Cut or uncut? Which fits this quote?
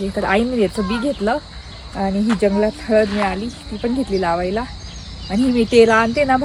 uncut